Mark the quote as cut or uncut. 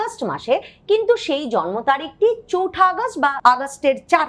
cut